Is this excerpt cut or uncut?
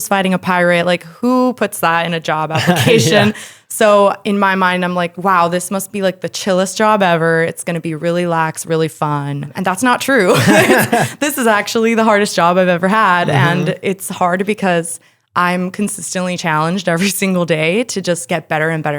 cut